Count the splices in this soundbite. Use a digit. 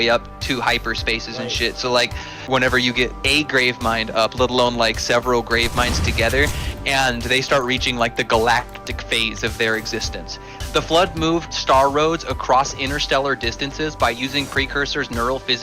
2